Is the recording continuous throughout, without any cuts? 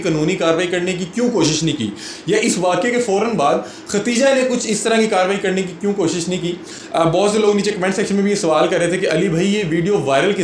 yes; 0 cuts

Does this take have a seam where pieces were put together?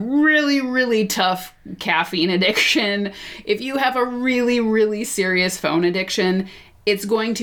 no; 0 cuts

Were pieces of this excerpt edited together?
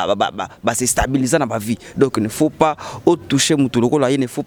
no; 0 cuts

